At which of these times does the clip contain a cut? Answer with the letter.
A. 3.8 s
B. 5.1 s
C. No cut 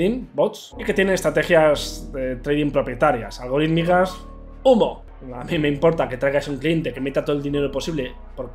B